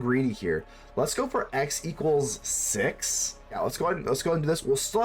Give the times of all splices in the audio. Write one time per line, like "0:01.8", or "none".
0:03.6